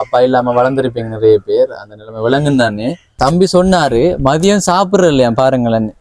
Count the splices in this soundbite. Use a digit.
1